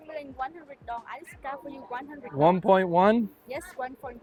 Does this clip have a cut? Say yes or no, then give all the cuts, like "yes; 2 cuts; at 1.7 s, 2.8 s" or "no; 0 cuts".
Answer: no; 0 cuts